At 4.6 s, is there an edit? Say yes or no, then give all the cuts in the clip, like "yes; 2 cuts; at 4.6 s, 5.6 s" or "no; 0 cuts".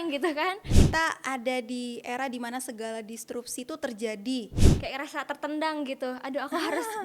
yes; 2 cuts; at 0.8 s, 4.6 s